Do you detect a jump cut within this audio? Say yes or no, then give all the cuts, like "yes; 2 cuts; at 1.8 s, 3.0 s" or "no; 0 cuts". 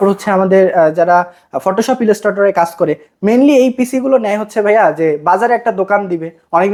no; 0 cuts